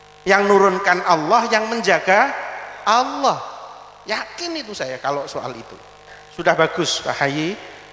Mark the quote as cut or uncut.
cut